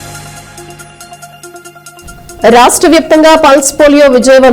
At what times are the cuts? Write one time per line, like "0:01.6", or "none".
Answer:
0:02.0